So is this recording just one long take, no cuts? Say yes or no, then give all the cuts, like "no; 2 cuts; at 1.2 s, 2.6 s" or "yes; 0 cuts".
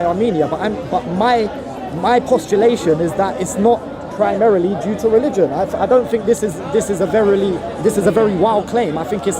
yes; 0 cuts